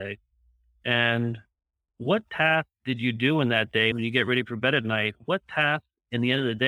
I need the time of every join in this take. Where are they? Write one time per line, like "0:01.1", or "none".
0:03.9